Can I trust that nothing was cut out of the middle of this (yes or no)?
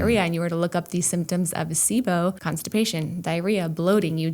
no